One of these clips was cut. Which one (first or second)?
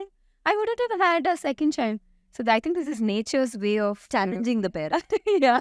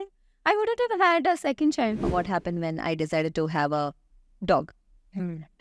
second